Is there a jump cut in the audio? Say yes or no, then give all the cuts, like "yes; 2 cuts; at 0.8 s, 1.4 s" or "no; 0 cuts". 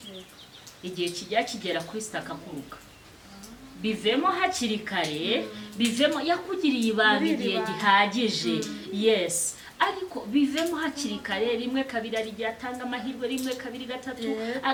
no; 0 cuts